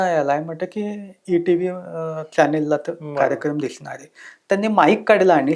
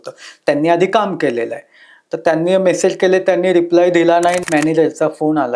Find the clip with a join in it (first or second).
second